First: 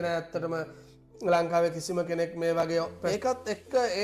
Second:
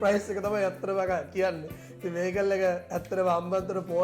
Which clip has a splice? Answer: first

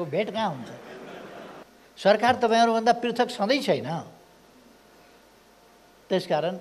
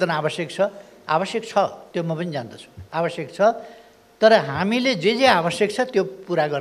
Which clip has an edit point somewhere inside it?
first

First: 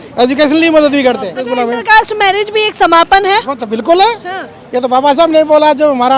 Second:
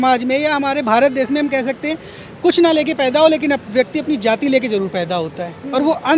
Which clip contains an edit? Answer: first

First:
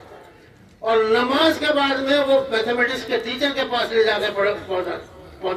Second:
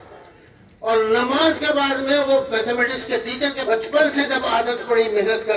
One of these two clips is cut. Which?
second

